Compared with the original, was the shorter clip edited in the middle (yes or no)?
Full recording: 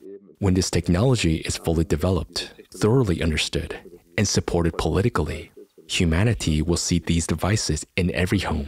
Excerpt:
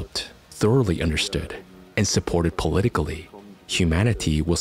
no